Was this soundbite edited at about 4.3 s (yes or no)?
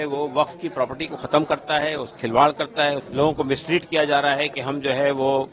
no